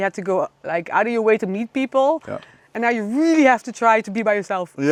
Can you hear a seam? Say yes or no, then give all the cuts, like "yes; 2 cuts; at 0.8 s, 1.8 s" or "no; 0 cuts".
no; 0 cuts